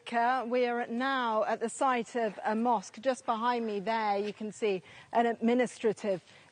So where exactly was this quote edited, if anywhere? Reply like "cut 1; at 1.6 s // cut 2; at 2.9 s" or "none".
none